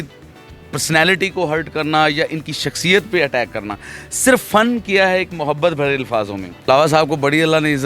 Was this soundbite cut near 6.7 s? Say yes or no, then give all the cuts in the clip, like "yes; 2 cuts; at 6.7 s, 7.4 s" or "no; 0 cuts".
yes; 1 cut; at 6.7 s